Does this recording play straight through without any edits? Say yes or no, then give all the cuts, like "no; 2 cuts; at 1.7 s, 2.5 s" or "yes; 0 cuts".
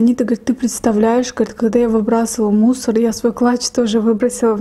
yes; 0 cuts